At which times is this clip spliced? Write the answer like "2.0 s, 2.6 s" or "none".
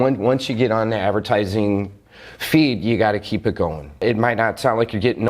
4.0 s